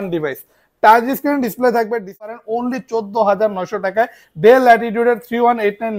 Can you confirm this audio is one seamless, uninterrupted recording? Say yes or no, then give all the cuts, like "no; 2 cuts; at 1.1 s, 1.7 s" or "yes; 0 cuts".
no; 1 cut; at 2.3 s